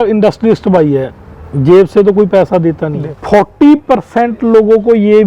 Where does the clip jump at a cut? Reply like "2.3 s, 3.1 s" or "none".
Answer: 3.1 s